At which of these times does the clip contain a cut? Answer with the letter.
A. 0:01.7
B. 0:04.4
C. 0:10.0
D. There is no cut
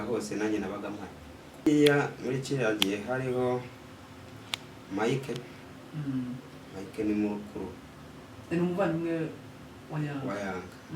A